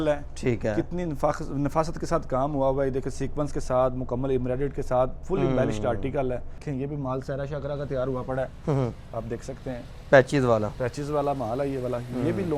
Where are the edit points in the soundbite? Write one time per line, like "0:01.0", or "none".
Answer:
0:06.6